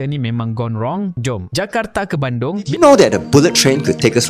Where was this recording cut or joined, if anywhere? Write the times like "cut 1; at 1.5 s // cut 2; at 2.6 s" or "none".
cut 1; at 2.8 s